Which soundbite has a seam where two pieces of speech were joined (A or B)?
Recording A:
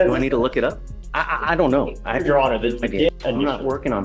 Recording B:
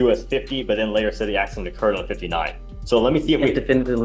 A